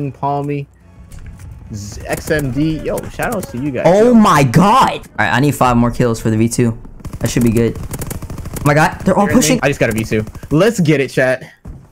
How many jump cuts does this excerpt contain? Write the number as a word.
two